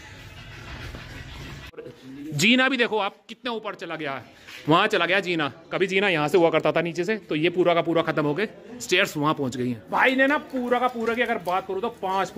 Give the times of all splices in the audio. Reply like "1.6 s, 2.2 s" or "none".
2.0 s, 9.8 s